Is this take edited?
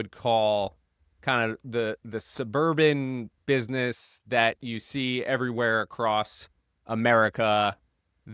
no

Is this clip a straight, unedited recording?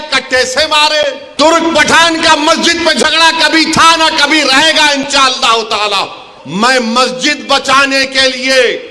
no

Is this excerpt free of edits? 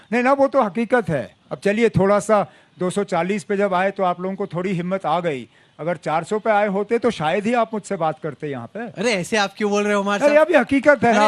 yes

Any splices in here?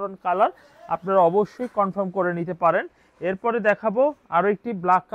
no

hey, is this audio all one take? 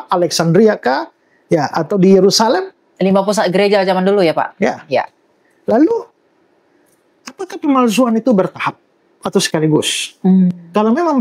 yes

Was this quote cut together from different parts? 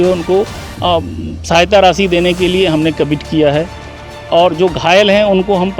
no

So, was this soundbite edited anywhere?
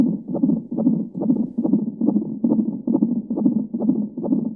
no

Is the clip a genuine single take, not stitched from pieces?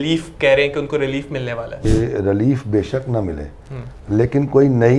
no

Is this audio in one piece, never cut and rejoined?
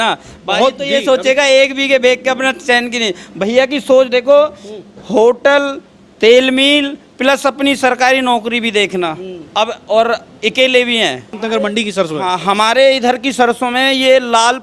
no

